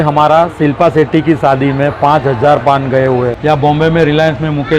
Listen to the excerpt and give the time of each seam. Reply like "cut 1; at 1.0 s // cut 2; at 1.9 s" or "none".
cut 1; at 3.3 s